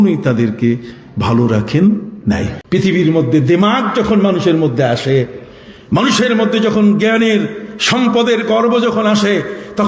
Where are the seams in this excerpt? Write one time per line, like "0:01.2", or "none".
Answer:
0:02.5